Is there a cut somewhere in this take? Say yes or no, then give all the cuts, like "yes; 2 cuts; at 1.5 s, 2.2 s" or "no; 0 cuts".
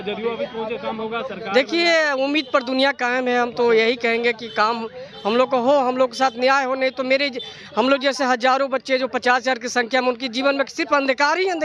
no; 0 cuts